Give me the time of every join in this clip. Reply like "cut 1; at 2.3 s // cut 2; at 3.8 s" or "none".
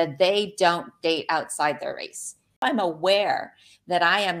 cut 1; at 2.5 s